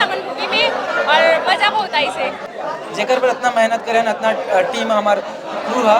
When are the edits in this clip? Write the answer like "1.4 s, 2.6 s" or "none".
2.5 s